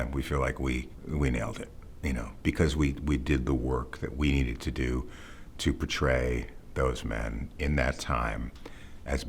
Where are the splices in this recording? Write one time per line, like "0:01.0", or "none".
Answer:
0:01.0